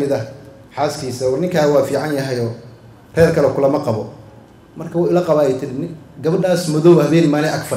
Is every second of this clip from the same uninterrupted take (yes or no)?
yes